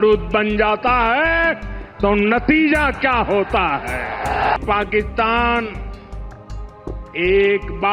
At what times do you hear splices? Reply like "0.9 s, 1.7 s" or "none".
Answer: 4.5 s, 5.8 s, 7.1 s